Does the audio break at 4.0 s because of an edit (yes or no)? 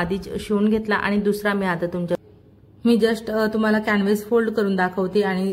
no